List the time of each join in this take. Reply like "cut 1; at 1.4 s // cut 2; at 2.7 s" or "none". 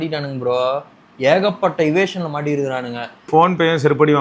cut 1; at 3.3 s